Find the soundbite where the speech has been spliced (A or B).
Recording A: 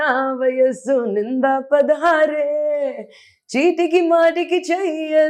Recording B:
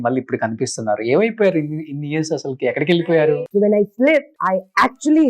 B